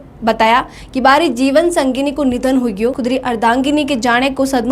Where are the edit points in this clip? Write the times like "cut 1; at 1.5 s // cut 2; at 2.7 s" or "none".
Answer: cut 1; at 3.0 s